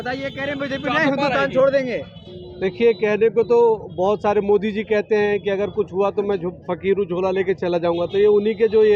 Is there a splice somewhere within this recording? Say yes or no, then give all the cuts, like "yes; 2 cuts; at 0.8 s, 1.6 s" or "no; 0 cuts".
no; 0 cuts